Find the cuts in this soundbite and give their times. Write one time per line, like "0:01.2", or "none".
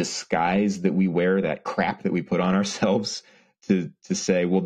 none